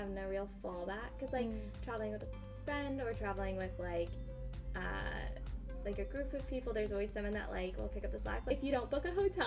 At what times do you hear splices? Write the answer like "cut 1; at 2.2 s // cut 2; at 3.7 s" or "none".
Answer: cut 1; at 8.5 s